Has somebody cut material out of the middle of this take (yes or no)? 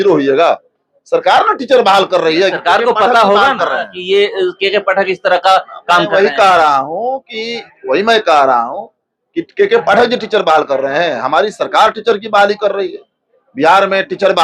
no